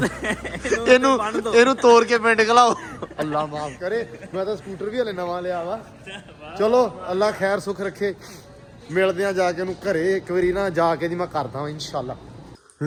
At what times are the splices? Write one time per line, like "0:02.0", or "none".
none